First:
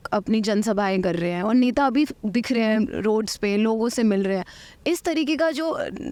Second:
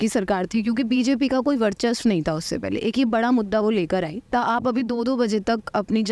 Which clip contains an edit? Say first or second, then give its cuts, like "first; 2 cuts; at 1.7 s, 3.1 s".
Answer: second; 1 cut; at 4.3 s